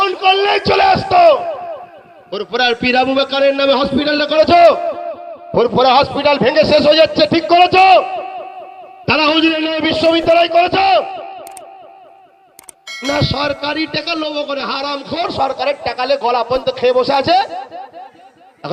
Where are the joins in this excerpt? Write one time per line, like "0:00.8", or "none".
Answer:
none